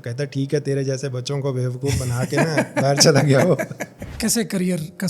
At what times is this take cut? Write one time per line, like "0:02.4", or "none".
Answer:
0:04.1